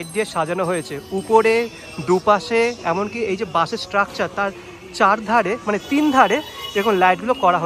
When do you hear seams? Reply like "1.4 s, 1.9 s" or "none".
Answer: none